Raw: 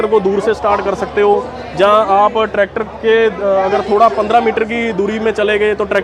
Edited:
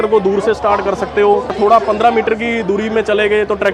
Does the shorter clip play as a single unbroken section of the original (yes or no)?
no